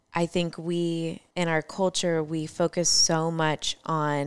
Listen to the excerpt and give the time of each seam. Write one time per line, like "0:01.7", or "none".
0:01.2